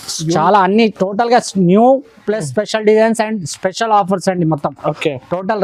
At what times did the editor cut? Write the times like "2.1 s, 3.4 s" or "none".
none